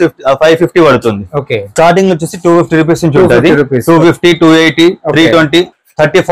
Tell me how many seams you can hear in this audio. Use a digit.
1